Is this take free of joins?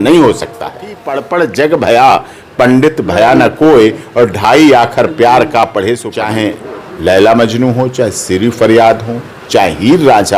no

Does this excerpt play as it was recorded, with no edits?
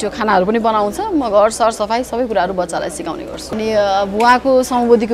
no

